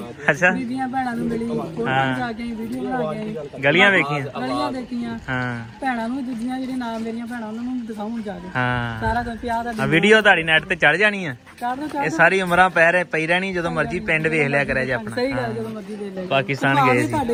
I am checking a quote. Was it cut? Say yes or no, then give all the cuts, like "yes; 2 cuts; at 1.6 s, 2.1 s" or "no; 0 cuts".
no; 0 cuts